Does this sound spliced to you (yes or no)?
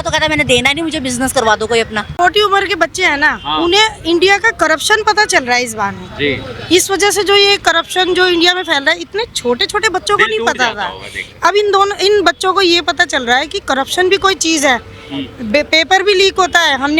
yes